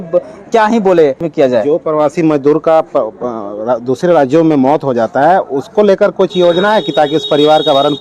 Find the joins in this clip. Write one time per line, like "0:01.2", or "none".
0:01.2

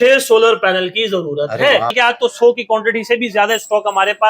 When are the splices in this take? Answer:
0:01.9

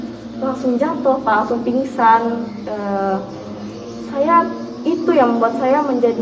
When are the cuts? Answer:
none

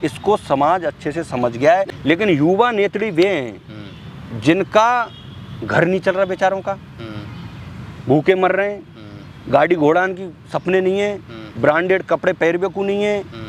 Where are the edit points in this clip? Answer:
0:01.9

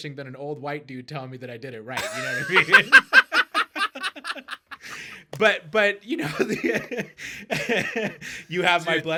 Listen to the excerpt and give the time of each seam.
none

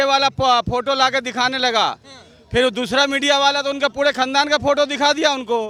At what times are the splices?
none

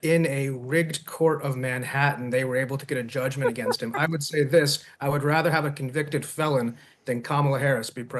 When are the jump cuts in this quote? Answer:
none

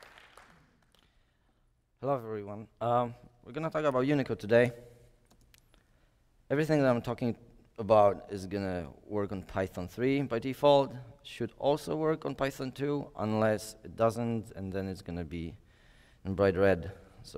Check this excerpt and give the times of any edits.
0:05.7

